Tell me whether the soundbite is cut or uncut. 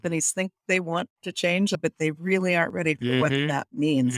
cut